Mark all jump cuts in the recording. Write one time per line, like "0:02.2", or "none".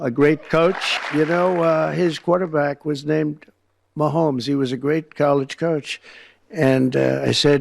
0:00.9